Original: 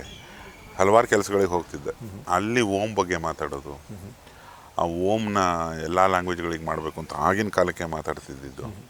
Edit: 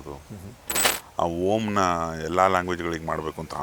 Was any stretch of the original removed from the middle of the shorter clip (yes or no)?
no